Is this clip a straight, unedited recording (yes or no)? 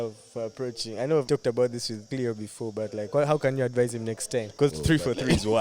no